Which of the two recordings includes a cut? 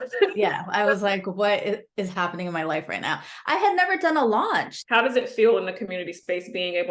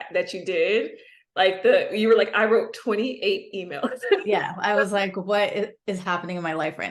first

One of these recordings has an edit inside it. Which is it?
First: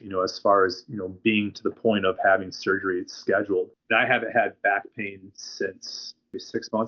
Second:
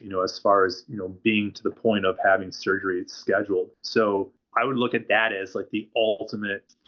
first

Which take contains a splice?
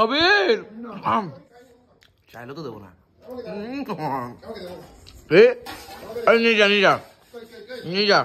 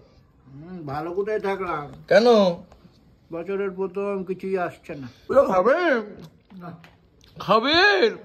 second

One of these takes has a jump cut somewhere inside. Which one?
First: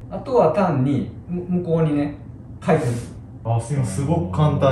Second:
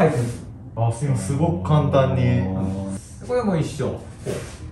second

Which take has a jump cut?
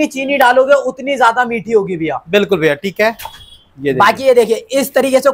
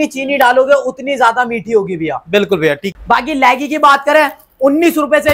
second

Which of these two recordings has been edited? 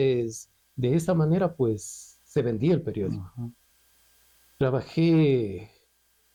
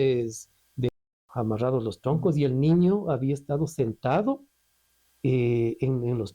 second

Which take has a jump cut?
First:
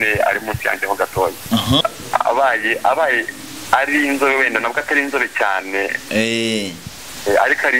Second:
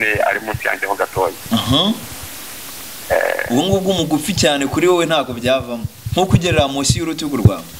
first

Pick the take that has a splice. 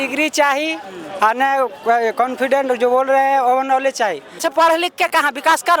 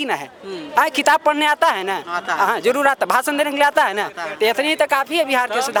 first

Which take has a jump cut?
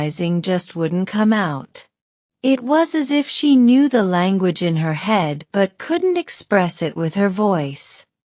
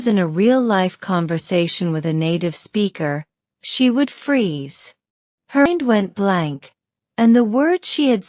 second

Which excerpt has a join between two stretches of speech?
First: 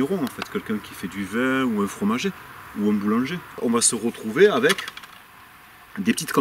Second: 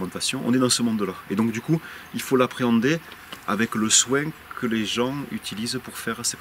first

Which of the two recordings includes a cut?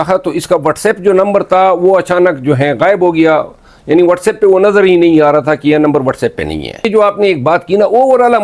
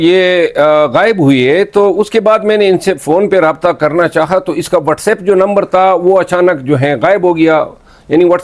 first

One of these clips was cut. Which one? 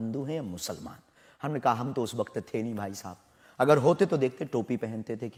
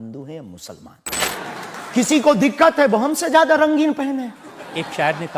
second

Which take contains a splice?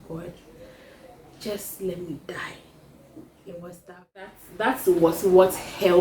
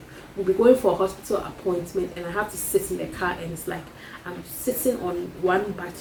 first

